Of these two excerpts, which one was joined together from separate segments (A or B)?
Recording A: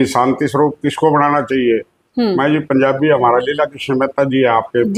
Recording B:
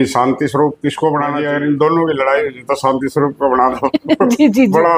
B